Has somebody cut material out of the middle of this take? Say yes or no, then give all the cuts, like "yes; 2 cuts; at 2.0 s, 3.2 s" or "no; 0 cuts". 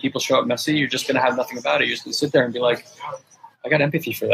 no; 0 cuts